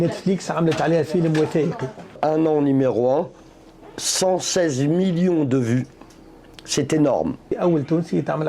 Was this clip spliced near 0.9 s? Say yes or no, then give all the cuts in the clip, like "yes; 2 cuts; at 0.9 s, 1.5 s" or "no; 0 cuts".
no; 2 cuts; at 2.2 s, 7.5 s